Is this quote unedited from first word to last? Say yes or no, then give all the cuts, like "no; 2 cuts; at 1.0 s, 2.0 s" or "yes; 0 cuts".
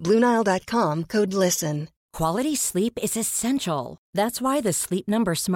no; 1 cut; at 2.0 s